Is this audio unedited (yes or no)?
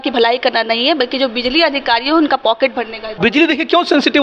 no